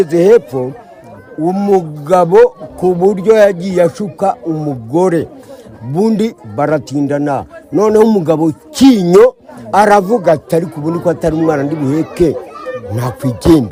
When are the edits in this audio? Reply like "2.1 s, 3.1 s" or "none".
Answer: none